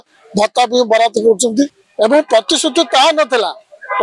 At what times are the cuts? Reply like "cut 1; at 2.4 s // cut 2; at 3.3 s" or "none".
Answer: cut 1; at 1.8 s